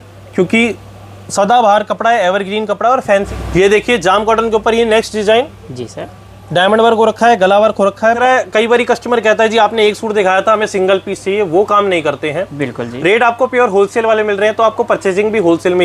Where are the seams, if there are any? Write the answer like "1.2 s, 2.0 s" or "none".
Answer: 3.3 s, 8.2 s